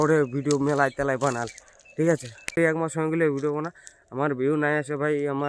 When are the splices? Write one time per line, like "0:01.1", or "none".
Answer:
0:02.5

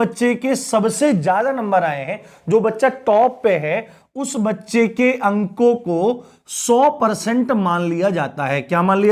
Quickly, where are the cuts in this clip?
none

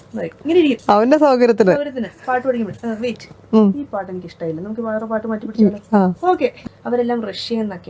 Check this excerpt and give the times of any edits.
0:06.6

